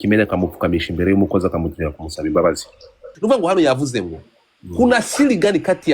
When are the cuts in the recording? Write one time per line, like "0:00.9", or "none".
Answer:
0:03.0